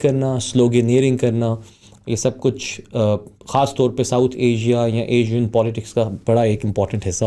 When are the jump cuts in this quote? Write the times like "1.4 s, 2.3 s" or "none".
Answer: none